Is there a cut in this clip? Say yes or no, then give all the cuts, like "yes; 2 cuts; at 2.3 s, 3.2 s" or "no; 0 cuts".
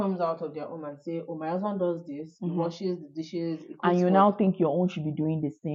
no; 0 cuts